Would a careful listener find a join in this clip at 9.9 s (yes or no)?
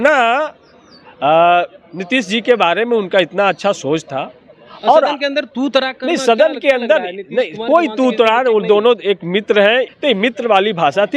yes